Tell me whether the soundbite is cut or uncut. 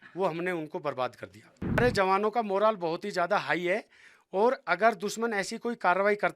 cut